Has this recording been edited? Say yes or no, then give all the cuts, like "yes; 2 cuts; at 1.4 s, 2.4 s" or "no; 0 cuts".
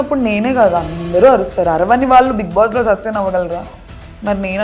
no; 0 cuts